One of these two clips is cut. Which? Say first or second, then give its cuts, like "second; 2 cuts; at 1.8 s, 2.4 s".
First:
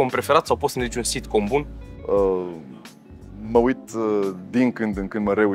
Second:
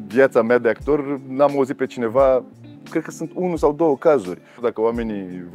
second; 1 cut; at 4.6 s